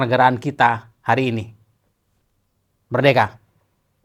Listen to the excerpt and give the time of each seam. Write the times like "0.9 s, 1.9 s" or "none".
none